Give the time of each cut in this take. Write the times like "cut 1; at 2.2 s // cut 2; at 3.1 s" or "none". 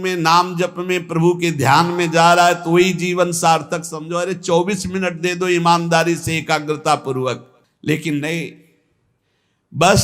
none